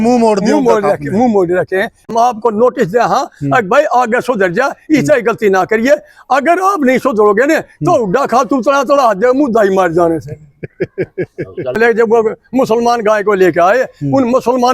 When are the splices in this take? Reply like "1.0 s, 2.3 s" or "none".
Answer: 2.1 s, 11.8 s